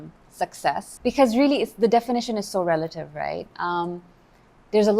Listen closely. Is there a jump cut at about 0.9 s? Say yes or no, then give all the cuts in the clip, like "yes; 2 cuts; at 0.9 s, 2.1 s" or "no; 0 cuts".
yes; 1 cut; at 0.9 s